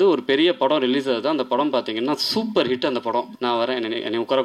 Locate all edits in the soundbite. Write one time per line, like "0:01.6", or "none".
0:03.3